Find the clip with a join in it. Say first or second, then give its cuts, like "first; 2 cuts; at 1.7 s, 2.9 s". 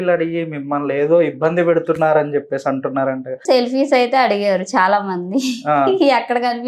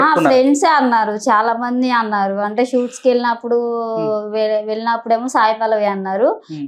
first; 1 cut; at 3.4 s